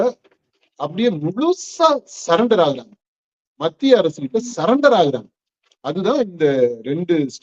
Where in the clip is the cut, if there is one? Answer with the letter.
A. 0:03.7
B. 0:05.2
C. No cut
C